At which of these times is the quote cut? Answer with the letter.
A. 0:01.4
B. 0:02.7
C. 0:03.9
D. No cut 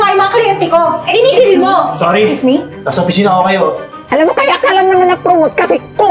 C